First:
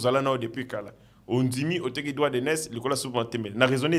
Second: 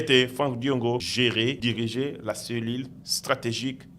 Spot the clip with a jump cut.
second; 1 cut; at 1.4 s

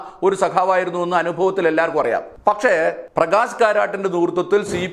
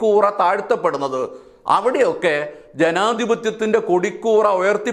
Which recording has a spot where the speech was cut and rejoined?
first; 1 cut; at 2.8 s

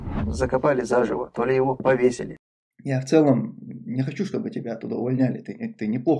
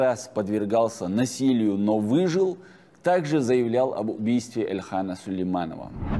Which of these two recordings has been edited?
first; 1 cut; at 2.3 s

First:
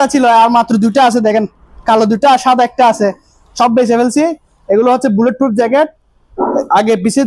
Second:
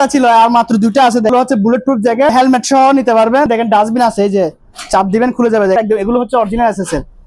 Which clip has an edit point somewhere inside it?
second; 4 cuts; at 1.3 s, 2.3 s, 3.5 s, 5.8 s

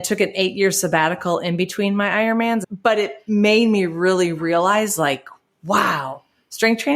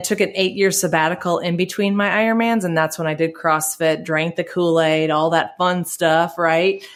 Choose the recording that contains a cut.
first; 1 cut; at 2.6 s

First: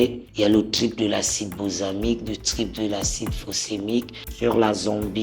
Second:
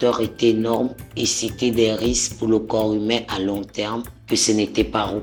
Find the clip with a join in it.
first; 1 cut; at 4.2 s

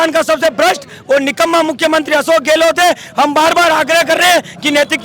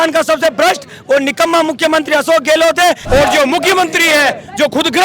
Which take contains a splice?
second; 1 cut; at 3.0 s

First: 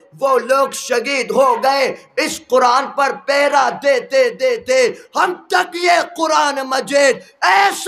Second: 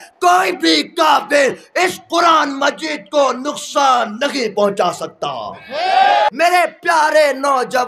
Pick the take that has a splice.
second; 1 cut; at 6.3 s

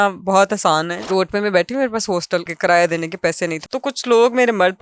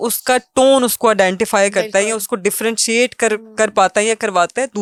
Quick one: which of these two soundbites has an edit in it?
first; 3 cuts; at 1.0 s, 2.5 s, 3.6 s

